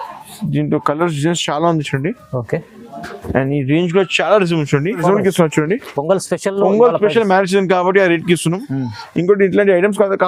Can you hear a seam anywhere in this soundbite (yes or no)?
yes